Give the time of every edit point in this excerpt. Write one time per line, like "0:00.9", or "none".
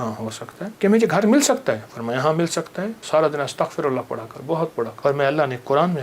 0:00.7
0:03.0
0:04.9